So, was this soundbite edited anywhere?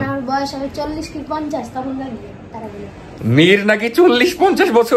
no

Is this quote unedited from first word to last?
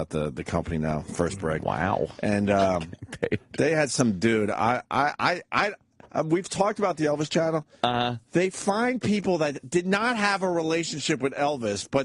no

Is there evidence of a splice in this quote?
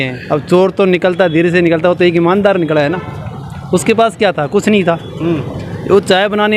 no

